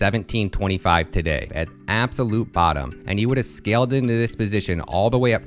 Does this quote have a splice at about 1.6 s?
yes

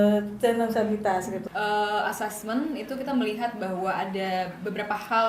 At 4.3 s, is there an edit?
no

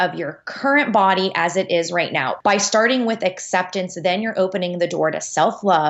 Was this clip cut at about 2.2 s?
yes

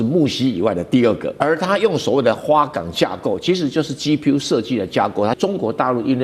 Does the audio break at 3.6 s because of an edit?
no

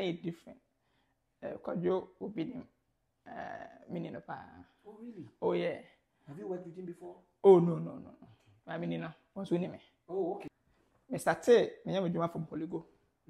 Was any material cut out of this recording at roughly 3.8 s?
no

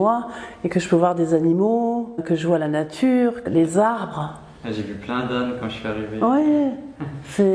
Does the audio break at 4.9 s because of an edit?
no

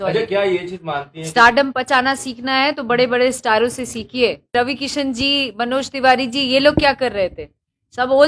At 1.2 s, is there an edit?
no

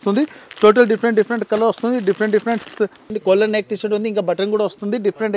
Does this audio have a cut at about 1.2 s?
no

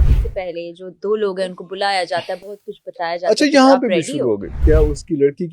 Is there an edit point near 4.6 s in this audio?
yes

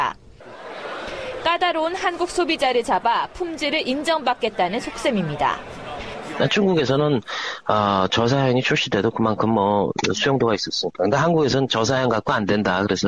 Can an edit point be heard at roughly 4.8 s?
no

